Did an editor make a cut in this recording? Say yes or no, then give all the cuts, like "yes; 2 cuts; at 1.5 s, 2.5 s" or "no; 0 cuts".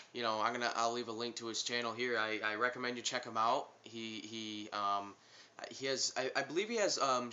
yes; 1 cut; at 4.7 s